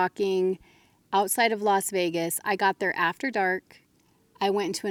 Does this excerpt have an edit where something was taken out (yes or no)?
no